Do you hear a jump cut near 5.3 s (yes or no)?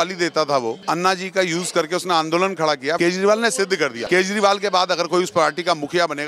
no